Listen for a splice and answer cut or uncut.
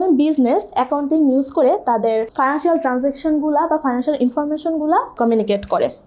cut